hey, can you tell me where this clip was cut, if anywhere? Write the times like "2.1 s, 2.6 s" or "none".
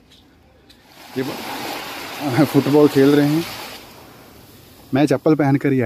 1.0 s